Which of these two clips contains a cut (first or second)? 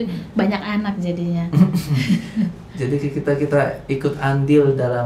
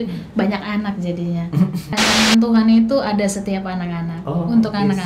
second